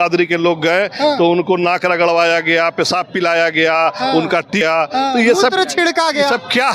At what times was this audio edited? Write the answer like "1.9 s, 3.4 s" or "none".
4.6 s